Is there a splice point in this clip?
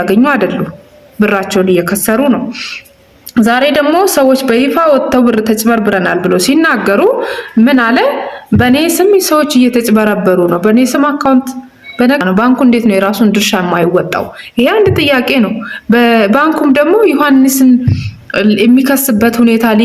yes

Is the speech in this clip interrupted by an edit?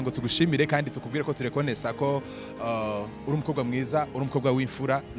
no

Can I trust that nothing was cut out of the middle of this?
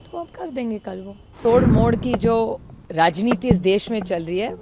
no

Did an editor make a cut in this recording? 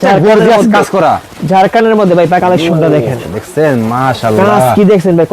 yes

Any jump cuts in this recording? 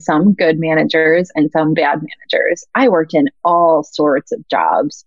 yes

